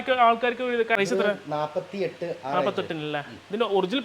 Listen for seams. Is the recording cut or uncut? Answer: cut